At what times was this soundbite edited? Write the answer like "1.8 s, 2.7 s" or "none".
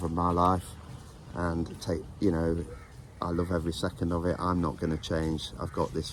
none